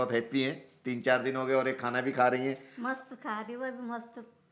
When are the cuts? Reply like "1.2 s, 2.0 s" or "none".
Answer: none